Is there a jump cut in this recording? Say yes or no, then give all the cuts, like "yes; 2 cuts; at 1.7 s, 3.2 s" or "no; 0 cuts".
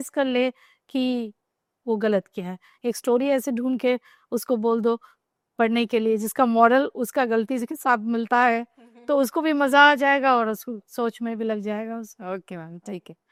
no; 0 cuts